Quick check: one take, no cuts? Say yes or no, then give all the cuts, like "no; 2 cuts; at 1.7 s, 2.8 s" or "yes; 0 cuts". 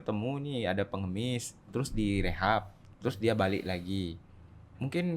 no; 1 cut; at 1.7 s